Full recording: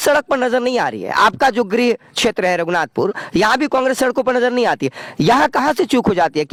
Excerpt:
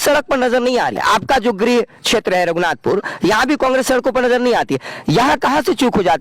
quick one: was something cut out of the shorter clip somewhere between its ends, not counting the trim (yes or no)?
yes